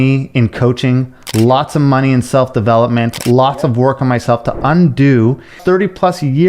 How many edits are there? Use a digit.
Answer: 1